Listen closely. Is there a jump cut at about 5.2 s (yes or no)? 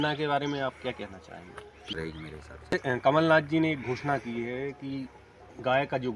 no